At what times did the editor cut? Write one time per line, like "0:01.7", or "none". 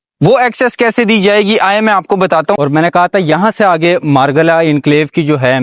0:02.6

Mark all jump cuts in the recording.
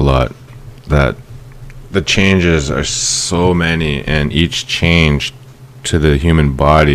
0:05.5

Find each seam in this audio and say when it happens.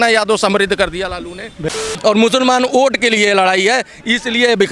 0:01.8

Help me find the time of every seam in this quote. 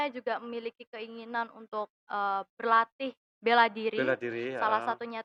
none

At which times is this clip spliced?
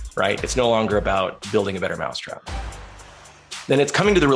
none

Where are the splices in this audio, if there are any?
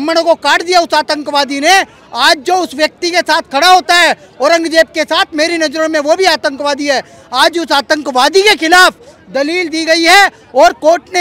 none

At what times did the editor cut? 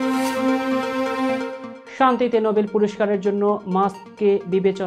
none

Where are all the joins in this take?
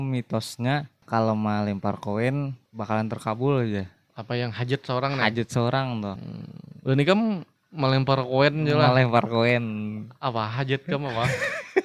0:01.0
0:02.6
0:06.1

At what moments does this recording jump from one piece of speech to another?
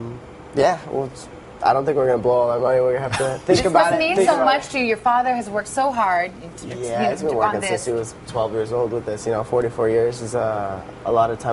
0:03.9

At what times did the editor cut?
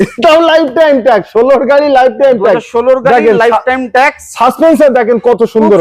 none

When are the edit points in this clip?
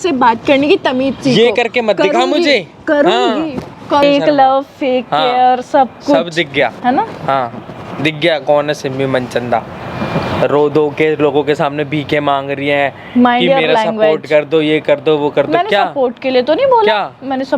0:04.0

